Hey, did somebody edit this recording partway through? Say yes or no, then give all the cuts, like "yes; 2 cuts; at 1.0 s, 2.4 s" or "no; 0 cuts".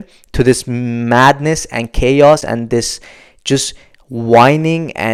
no; 0 cuts